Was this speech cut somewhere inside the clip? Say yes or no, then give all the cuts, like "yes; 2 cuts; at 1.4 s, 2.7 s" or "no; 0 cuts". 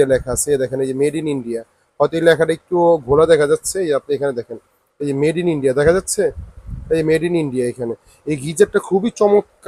no; 0 cuts